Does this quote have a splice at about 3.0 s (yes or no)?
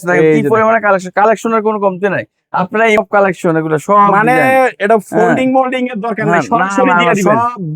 yes